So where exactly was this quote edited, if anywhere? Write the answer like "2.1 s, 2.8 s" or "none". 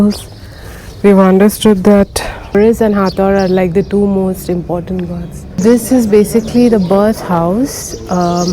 2.5 s, 5.4 s